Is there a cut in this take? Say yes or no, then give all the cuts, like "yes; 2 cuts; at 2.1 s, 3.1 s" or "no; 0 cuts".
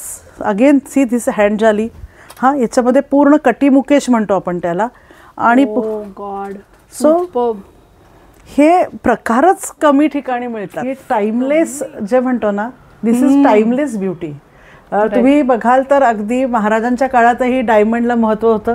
yes; 1 cut; at 11.0 s